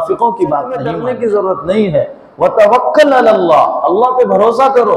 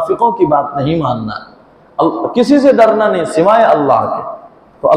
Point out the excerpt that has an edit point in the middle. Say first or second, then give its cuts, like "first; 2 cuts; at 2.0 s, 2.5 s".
first; 1 cut; at 0.9 s